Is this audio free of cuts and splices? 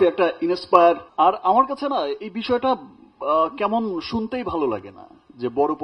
no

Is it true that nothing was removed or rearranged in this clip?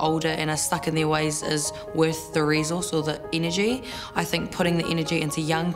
no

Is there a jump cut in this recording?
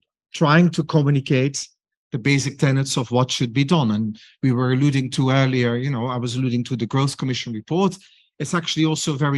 no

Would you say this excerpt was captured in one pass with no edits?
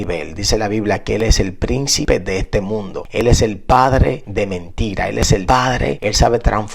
no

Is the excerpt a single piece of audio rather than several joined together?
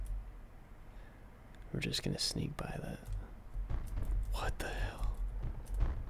no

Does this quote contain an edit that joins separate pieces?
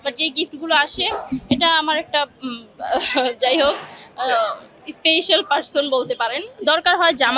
yes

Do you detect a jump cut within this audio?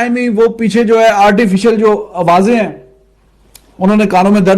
yes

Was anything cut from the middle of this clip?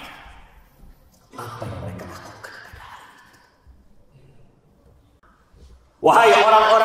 yes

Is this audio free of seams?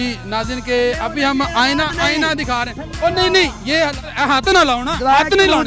no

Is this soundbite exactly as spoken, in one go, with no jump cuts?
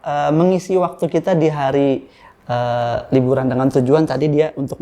yes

